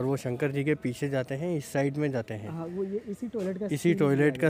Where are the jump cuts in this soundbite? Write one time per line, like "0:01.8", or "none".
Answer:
none